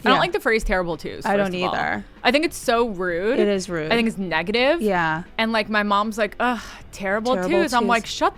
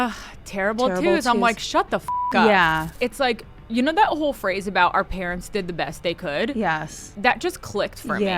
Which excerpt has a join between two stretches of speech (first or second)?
second